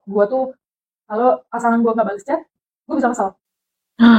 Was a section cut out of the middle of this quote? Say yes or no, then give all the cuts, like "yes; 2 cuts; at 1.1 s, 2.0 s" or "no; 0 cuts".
no; 0 cuts